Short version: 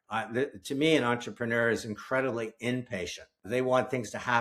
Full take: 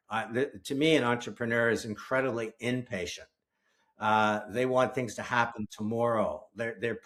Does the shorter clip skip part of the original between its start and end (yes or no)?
yes